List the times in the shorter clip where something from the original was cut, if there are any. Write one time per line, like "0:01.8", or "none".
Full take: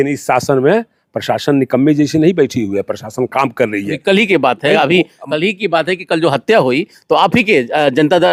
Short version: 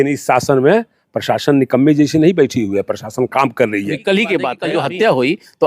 0:04.6